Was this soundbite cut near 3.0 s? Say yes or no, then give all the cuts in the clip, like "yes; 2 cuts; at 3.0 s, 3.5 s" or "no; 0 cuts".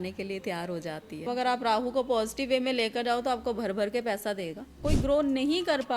no; 2 cuts; at 1.3 s, 4.7 s